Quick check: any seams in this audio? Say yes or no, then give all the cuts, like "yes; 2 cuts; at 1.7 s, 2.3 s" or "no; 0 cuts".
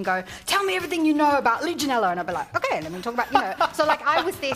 no; 0 cuts